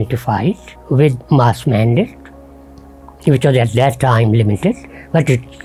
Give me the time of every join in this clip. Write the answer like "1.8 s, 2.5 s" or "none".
none